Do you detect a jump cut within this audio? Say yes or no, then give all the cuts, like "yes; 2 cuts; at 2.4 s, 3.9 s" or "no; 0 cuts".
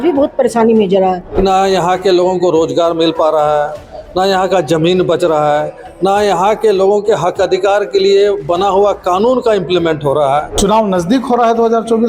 yes; 2 cuts; at 1.3 s, 10.5 s